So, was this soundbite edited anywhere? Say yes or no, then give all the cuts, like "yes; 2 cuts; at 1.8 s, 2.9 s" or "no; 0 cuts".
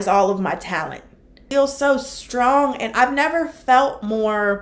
yes; 1 cut; at 1.4 s